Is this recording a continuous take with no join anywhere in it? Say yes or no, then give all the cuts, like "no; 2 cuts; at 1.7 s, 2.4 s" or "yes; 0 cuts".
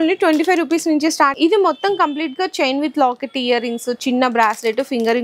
no; 1 cut; at 1.3 s